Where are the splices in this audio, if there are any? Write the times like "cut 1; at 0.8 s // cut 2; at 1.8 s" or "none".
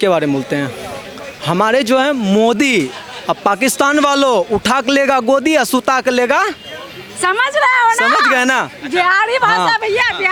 none